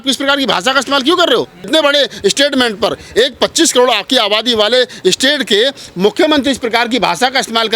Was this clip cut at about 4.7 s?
no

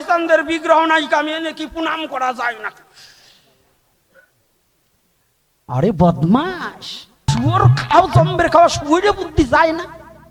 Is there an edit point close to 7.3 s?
yes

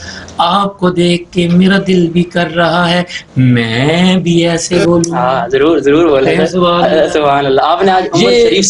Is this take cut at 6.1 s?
no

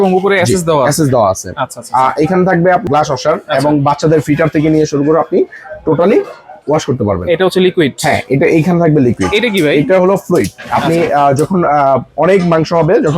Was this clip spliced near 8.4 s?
no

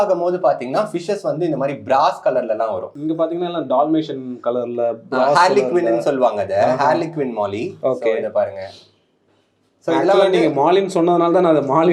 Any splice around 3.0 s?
no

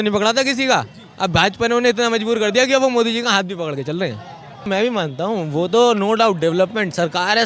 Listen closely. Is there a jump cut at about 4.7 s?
yes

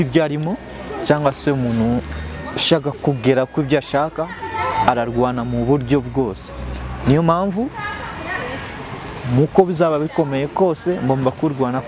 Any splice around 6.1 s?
no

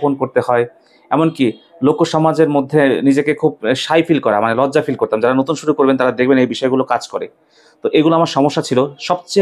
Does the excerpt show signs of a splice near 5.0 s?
no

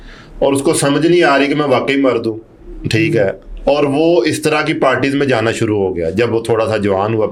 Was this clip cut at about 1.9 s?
no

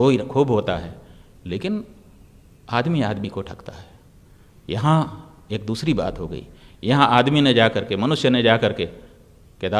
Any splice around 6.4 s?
no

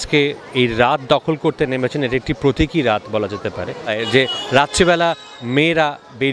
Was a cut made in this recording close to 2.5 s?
no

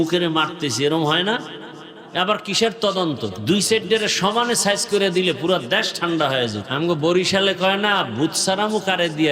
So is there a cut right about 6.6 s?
yes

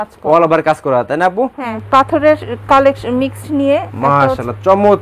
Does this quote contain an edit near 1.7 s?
yes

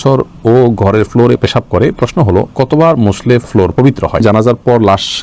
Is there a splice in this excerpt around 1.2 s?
no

